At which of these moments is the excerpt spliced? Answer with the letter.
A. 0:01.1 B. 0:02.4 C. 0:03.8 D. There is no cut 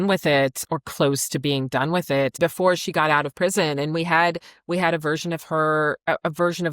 B